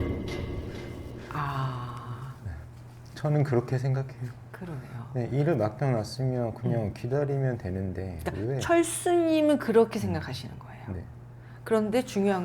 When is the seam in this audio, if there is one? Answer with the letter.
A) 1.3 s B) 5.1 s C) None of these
A